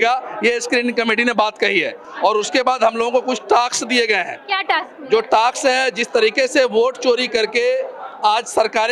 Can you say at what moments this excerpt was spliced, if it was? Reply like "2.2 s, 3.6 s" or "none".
none